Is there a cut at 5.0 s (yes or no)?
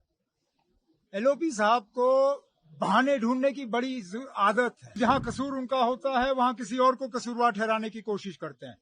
yes